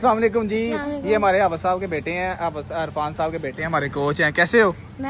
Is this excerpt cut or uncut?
uncut